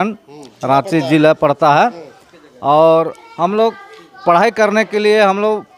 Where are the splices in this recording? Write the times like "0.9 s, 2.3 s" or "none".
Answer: none